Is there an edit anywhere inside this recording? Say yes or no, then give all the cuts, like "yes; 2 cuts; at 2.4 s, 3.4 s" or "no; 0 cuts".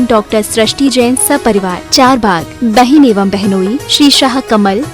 no; 0 cuts